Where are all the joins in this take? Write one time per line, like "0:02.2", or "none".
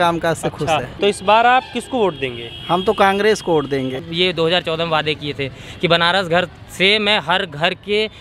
0:00.9
0:04.0

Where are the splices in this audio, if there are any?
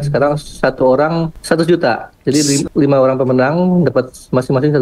0:01.3
0:02.6

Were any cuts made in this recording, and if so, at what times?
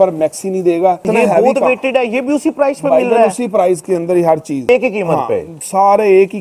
0:01.1
0:04.7

